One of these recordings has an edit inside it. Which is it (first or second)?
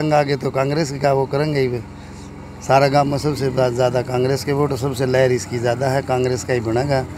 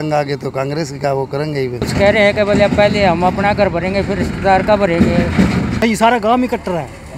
second